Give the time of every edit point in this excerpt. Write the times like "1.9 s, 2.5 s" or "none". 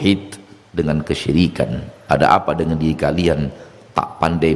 1.9 s